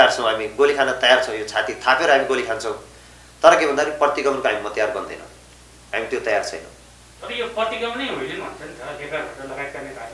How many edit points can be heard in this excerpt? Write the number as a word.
zero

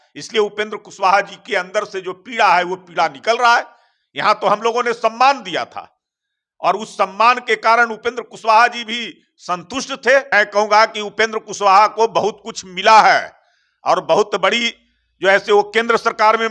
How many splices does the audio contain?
one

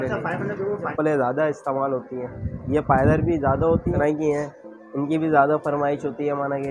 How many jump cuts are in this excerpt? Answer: two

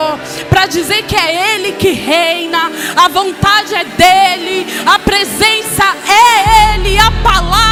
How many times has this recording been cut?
zero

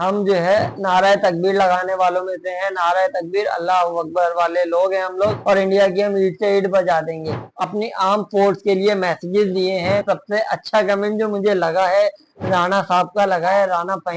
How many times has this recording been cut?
two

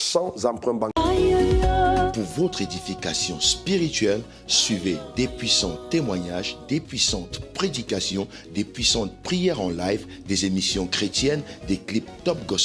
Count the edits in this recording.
one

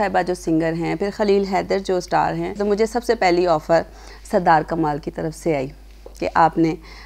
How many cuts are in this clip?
one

